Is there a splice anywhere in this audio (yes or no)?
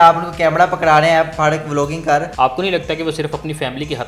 yes